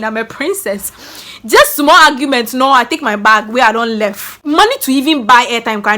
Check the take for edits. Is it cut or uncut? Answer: cut